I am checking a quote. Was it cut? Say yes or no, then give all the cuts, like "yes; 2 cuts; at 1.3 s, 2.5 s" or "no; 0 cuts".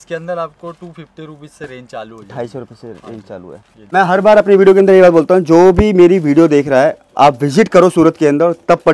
yes; 1 cut; at 3.7 s